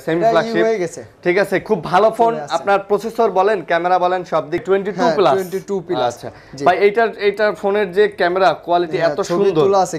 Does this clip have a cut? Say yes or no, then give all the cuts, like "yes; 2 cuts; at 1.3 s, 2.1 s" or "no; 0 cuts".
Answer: yes; 1 cut; at 4.6 s